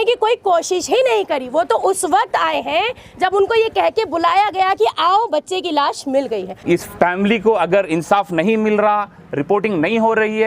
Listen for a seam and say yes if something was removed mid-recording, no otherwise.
yes